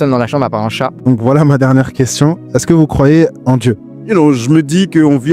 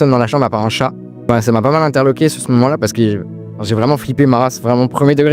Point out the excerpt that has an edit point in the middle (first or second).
first